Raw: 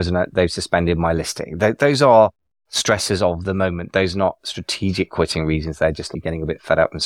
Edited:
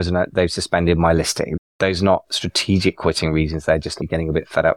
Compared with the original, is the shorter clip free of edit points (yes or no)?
no